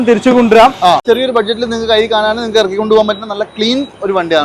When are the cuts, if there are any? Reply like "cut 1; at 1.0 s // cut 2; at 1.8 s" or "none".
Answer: cut 1; at 1.0 s